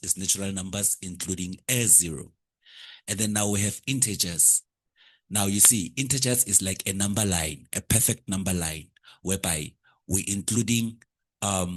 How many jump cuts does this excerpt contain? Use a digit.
0